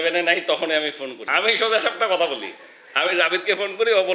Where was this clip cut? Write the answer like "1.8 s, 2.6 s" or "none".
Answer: 1.1 s